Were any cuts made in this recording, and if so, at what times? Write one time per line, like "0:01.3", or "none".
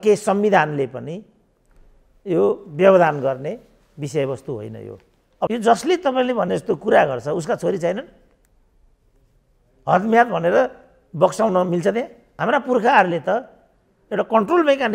0:05.5
0:12.2